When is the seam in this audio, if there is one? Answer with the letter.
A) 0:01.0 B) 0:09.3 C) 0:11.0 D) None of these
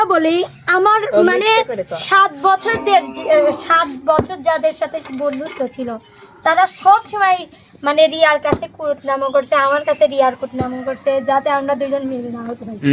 D